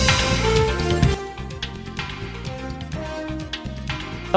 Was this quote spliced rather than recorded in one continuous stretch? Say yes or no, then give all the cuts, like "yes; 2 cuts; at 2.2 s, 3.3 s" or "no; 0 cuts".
yes; 1 cut; at 2.9 s